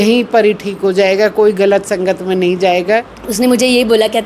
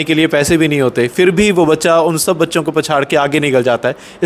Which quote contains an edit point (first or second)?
first